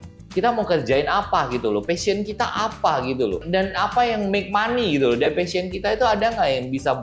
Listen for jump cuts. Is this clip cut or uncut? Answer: uncut